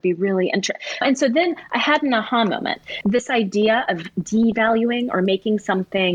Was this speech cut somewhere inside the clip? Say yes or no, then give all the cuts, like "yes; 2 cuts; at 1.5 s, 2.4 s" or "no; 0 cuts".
yes; 2 cuts; at 1.0 s, 2.9 s